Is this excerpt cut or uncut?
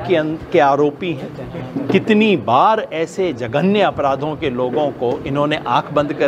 uncut